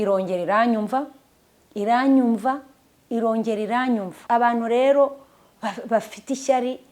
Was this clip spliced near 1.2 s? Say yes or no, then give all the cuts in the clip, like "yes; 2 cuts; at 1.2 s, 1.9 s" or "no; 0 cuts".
no; 1 cut; at 4.1 s